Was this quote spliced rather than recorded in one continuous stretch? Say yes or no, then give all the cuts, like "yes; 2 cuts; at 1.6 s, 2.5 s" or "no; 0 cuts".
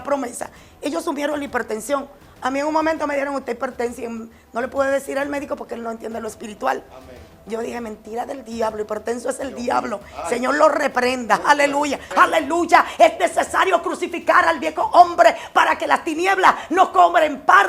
yes; 1 cut; at 12.0 s